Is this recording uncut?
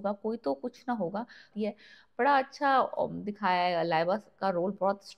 no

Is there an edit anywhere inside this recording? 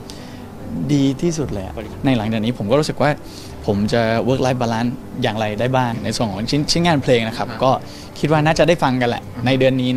yes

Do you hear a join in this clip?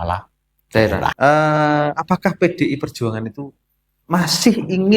yes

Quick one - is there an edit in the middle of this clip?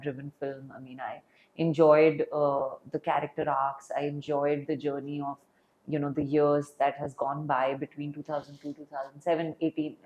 no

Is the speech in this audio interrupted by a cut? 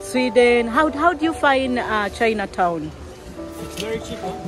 yes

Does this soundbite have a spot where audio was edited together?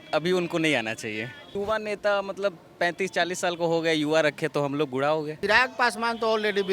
yes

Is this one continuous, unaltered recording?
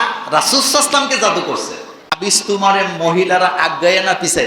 no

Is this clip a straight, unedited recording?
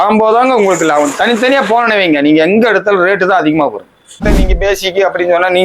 no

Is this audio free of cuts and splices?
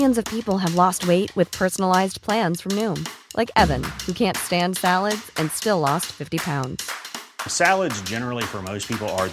yes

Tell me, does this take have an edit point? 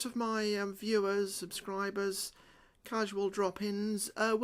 yes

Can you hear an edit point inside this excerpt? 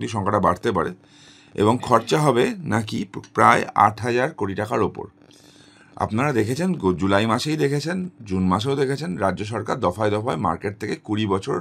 no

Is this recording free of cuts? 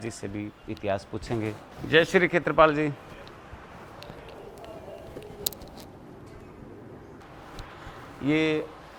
yes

